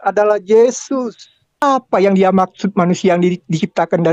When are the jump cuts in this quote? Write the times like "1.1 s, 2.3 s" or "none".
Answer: 1.6 s